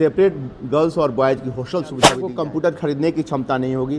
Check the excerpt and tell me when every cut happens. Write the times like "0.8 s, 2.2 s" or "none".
2.2 s